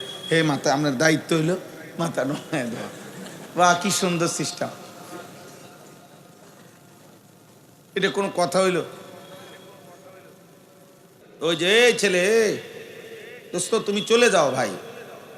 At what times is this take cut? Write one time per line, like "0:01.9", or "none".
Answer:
0:11.2